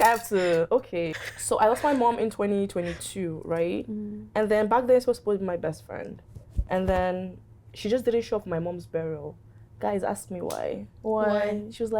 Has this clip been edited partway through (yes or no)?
yes